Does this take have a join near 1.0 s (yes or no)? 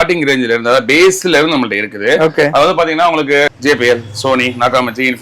no